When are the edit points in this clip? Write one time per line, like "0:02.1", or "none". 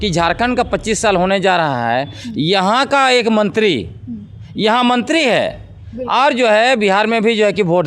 none